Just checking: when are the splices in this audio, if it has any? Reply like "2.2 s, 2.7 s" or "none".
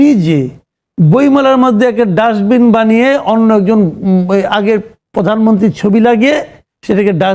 none